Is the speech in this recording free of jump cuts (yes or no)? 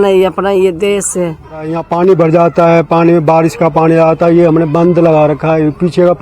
no